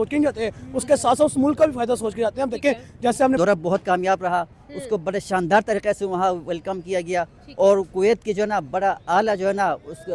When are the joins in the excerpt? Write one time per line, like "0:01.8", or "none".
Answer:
0:03.4